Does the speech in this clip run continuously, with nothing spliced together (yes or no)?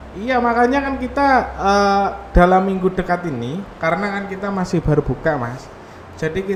yes